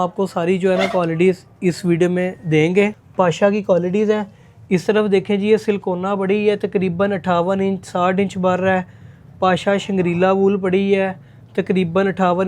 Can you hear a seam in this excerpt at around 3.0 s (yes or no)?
yes